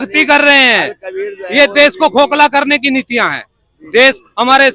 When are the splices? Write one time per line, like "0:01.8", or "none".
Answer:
none